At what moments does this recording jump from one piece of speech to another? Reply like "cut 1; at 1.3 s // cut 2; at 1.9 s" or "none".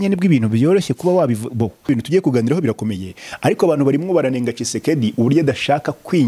cut 1; at 1.9 s